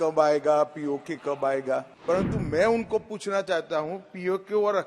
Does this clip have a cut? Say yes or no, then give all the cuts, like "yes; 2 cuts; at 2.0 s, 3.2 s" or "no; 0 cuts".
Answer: yes; 1 cut; at 1.9 s